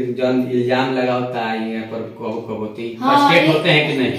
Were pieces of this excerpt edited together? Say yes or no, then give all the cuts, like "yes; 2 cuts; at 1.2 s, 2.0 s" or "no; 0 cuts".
no; 0 cuts